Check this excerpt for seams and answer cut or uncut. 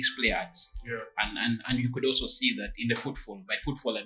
uncut